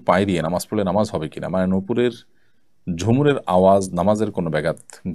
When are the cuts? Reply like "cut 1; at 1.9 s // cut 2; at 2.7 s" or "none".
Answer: none